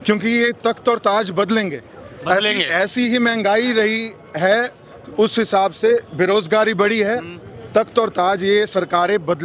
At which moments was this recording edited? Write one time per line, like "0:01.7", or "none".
none